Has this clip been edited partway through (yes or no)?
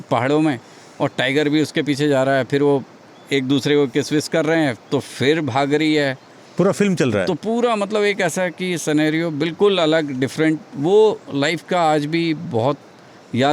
no